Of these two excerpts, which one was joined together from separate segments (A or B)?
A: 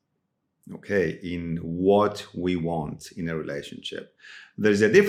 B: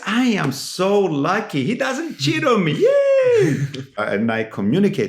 B